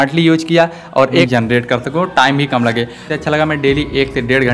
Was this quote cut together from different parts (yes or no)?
yes